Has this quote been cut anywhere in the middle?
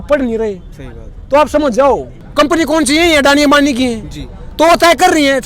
yes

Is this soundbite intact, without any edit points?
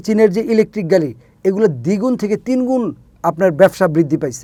yes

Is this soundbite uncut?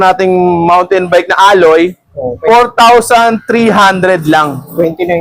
yes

